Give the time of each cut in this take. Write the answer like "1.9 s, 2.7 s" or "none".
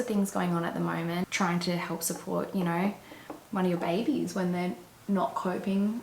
1.3 s